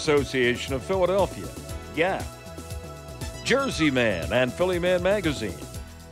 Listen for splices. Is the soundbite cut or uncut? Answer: uncut